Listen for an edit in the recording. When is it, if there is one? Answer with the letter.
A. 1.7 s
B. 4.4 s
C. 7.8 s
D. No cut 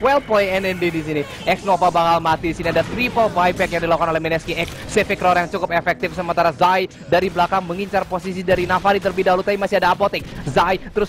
C